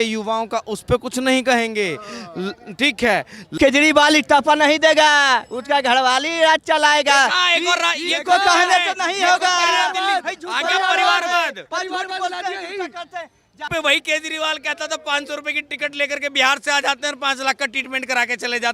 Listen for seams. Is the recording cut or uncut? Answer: cut